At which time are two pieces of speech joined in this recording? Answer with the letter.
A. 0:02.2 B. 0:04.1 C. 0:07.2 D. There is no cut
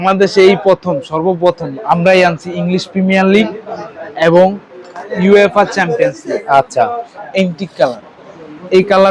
C